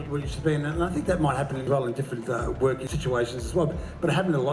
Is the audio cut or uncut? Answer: cut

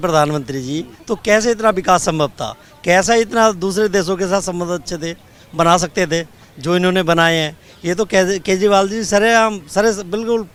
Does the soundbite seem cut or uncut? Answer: uncut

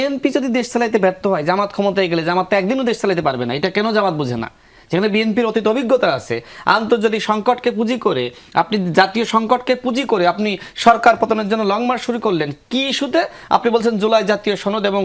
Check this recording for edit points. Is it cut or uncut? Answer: uncut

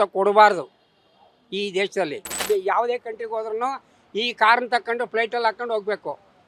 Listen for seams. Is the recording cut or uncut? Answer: cut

